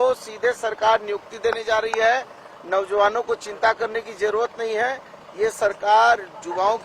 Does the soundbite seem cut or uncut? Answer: uncut